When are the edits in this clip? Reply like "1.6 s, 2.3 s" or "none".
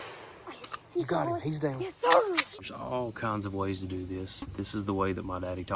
2.7 s, 4.5 s